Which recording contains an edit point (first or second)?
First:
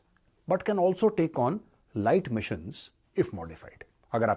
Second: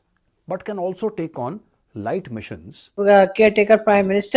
second